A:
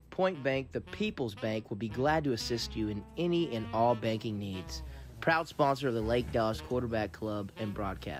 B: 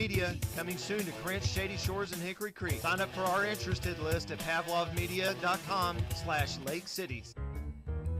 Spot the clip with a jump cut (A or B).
B